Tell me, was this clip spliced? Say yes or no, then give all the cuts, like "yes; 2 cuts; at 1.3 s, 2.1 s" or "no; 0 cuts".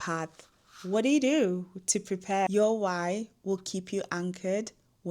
yes; 1 cut; at 2.5 s